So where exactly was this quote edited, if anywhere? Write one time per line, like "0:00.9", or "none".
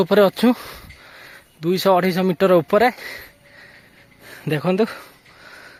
none